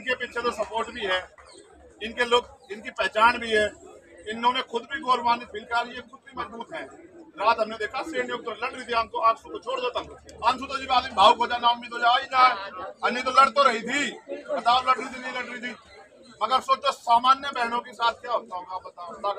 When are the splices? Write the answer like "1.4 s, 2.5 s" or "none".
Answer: none